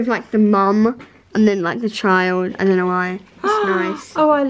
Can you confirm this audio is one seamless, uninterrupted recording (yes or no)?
yes